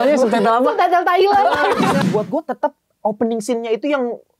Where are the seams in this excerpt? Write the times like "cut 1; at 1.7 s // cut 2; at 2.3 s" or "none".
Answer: cut 1; at 2.0 s

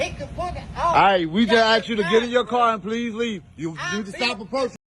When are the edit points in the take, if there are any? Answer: none

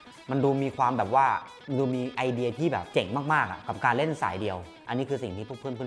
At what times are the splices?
cut 1; at 4.7 s

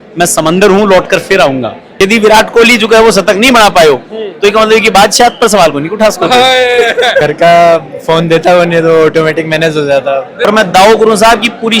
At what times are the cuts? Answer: cut 1; at 1.8 s // cut 2; at 7.2 s // cut 3; at 10.3 s

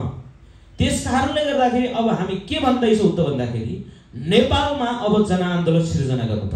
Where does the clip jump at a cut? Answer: none

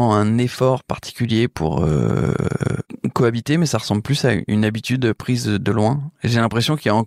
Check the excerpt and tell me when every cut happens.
none

